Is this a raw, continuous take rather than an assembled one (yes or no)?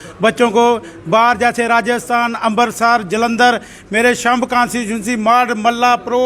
yes